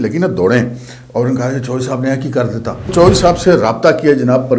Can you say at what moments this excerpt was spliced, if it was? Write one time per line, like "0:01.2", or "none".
0:02.9